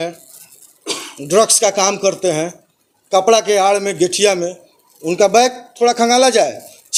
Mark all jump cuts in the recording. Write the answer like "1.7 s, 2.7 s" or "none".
none

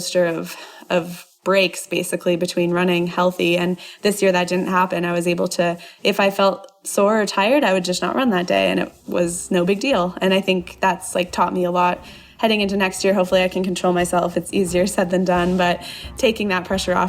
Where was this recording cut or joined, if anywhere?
16.1 s

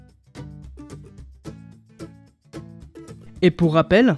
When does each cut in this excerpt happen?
none

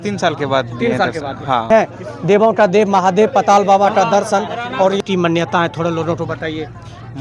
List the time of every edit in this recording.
1.7 s, 5.0 s

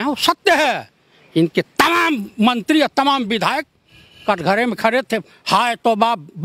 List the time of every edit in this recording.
none

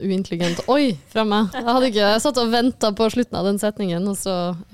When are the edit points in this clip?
none

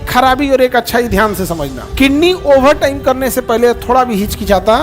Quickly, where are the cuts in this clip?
1.8 s

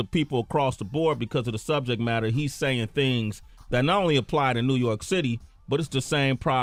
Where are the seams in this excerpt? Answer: none

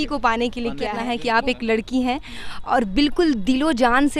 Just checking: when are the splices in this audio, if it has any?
1.1 s

